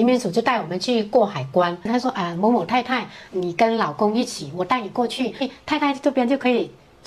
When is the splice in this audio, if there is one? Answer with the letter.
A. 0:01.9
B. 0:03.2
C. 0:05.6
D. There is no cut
A